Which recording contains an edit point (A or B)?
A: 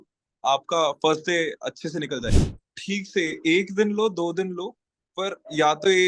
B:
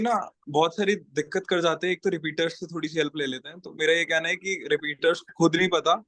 A